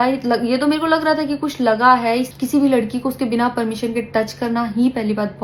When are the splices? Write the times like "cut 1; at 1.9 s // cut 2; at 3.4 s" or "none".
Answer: cut 1; at 2.3 s